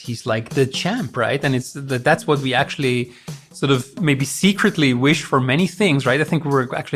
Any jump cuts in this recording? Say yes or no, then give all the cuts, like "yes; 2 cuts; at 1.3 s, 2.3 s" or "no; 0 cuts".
no; 0 cuts